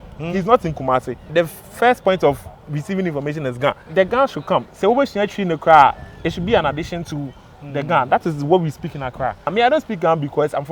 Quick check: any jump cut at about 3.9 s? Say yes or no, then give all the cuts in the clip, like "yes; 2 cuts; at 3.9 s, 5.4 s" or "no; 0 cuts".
yes; 3 cuts; at 1.3 s, 3.9 s, 9.5 s